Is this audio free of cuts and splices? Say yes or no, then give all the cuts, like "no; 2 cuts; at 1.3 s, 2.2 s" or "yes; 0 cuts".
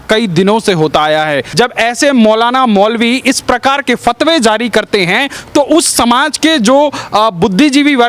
no; 1 cut; at 1.5 s